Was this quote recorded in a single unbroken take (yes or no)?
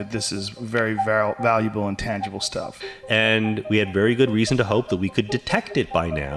no